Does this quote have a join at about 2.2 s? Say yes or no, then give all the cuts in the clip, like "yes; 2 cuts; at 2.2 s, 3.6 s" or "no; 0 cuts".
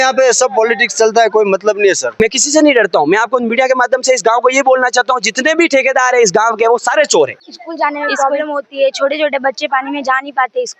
yes; 2 cuts; at 2.2 s, 7.4 s